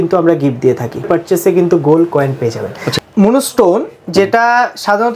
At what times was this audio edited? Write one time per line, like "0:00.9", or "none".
0:01.1
0:02.9